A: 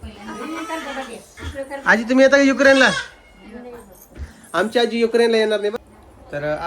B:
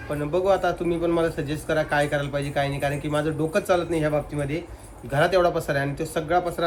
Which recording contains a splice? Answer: A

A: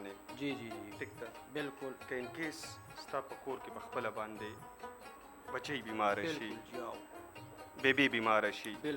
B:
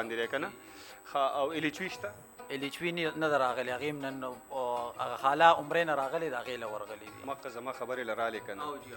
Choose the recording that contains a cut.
B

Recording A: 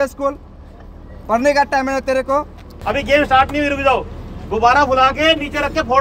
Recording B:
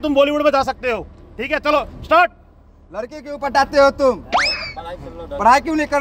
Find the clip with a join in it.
A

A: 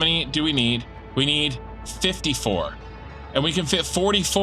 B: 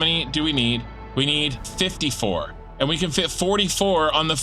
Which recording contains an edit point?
B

